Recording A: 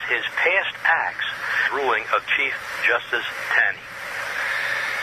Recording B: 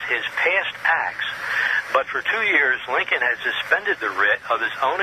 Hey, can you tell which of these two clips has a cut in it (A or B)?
B